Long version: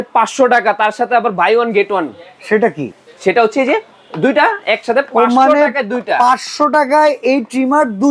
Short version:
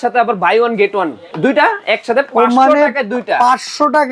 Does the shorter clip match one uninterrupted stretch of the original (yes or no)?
no